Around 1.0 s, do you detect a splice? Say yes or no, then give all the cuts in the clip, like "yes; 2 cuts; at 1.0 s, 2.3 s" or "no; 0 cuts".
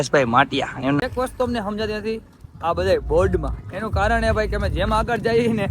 yes; 1 cut; at 1.0 s